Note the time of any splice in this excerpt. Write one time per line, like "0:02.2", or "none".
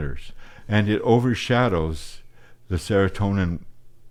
none

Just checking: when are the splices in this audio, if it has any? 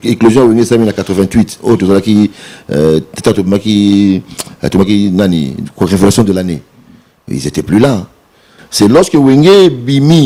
none

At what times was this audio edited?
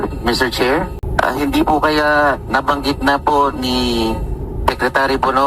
0:01.0

